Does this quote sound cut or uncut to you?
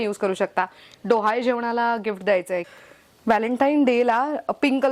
cut